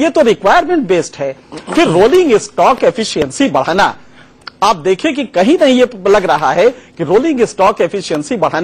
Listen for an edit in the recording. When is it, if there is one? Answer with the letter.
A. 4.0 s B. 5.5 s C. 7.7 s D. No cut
D